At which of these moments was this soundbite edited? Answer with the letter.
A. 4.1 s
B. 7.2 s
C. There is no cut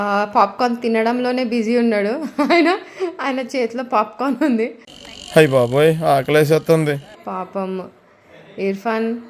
B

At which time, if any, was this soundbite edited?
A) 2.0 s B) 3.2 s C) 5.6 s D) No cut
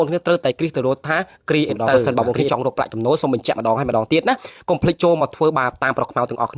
A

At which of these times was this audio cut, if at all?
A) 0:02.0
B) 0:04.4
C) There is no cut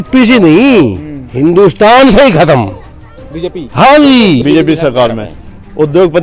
B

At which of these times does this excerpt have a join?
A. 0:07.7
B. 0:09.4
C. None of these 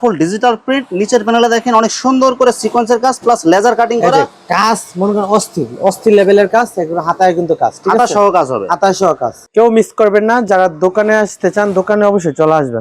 B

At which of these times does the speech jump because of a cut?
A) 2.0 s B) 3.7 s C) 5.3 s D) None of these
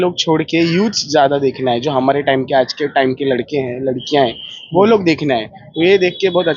D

